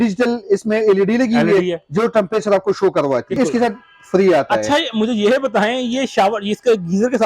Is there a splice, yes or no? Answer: yes